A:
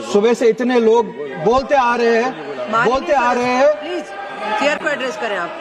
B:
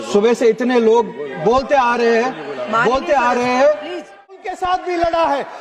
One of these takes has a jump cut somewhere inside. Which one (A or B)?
B